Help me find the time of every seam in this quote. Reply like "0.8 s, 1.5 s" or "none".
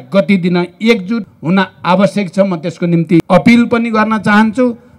1.3 s, 3.2 s

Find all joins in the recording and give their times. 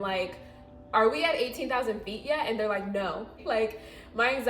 3.4 s

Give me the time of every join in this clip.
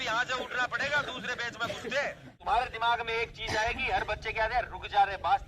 2.3 s

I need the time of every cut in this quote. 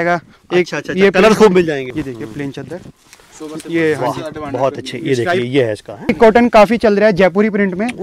1.8 s, 6.1 s

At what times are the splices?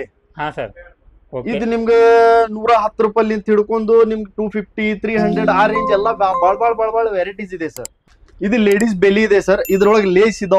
8.0 s

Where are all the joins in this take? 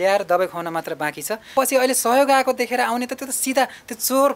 1.5 s

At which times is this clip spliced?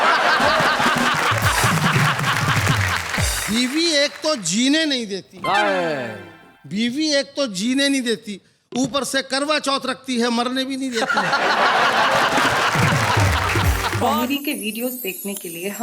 14.0 s

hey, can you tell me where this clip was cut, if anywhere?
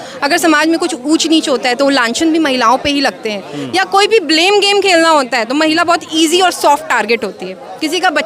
none

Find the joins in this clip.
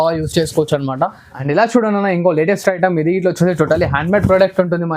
1.3 s

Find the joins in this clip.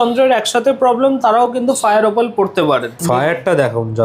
3.0 s

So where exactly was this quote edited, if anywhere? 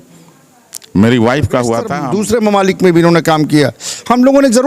2.0 s

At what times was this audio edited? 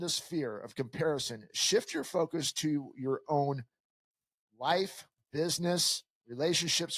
none

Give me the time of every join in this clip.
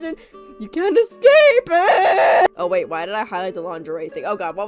2.5 s

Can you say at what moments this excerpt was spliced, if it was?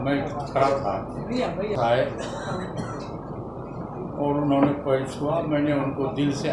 1.8 s

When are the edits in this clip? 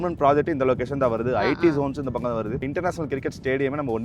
2.7 s

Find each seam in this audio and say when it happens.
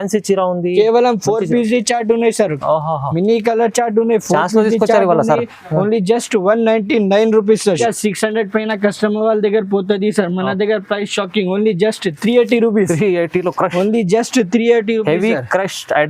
7.8 s

